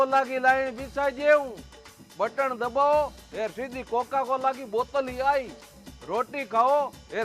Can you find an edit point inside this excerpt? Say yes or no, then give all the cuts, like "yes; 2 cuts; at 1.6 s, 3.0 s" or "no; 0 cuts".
no; 0 cuts